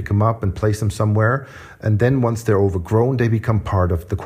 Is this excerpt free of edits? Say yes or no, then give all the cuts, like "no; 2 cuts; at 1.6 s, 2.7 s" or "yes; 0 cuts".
no; 1 cut; at 1.6 s